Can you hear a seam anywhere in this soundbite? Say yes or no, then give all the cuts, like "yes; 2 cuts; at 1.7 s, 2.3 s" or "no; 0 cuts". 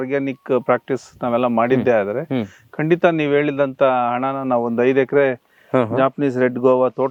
no; 0 cuts